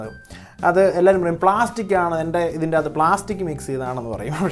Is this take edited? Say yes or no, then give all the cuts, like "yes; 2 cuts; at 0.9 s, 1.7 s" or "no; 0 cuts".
no; 0 cuts